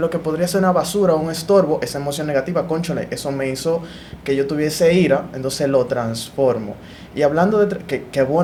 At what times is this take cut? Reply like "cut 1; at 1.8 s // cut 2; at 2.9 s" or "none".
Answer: none

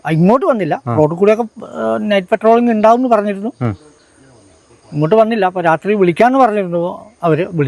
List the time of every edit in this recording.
none

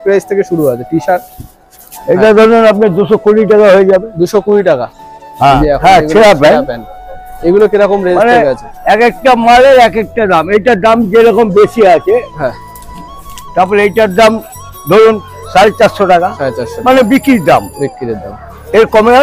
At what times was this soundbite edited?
cut 1; at 5.6 s

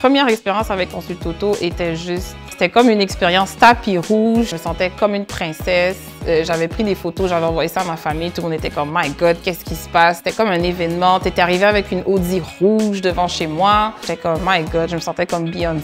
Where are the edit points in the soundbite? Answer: cut 1; at 2.5 s // cut 2; at 4.5 s // cut 3; at 14.1 s

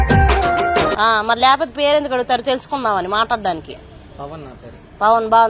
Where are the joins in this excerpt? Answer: cut 1; at 0.9 s

